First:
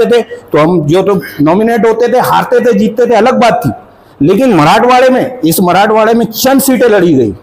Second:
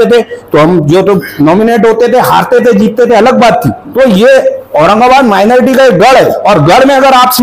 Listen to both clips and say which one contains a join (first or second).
second